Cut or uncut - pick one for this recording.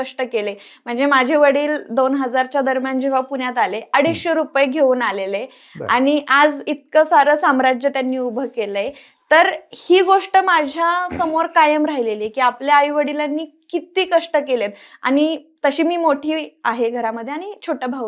uncut